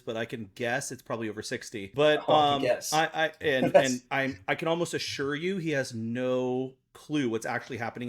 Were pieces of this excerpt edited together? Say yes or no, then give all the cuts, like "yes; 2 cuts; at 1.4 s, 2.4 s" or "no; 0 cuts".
yes; 1 cut; at 1.9 s